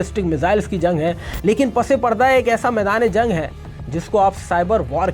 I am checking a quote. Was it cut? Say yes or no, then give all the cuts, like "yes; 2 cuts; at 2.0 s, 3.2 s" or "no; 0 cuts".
no; 0 cuts